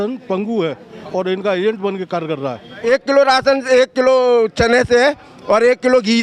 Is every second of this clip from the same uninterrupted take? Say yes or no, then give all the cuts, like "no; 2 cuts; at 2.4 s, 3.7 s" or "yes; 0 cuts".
no; 1 cut; at 2.8 s